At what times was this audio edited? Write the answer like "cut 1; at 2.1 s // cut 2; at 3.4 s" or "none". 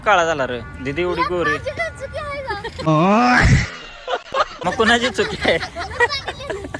none